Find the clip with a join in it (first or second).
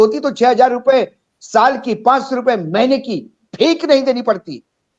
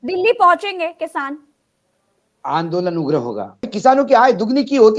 second